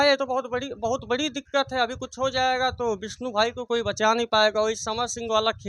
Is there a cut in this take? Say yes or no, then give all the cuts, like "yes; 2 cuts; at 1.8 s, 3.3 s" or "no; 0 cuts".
no; 0 cuts